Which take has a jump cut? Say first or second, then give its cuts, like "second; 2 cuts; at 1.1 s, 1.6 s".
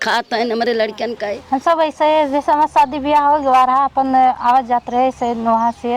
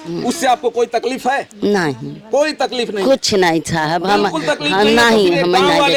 first; 1 cut; at 1.4 s